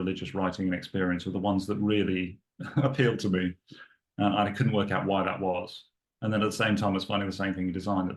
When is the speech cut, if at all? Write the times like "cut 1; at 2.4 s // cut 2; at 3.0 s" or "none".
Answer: none